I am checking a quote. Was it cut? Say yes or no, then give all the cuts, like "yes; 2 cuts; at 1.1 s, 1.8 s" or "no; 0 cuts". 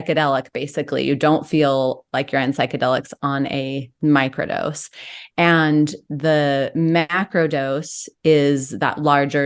no; 0 cuts